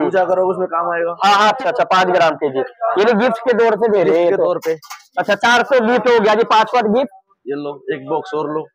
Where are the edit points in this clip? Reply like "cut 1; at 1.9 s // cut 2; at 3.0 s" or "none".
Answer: cut 1; at 1.6 s